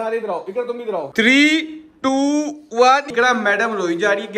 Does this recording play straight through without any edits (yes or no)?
no